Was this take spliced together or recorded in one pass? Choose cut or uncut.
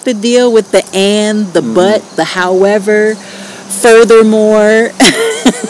uncut